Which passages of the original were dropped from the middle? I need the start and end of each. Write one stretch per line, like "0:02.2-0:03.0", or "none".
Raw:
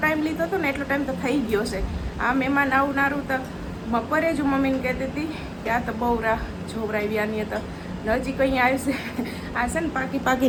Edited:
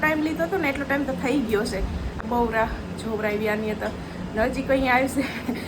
0:02.2-0:05.9